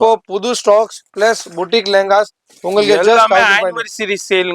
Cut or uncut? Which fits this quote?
uncut